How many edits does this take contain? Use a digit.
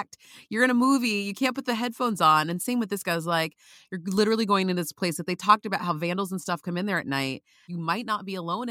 1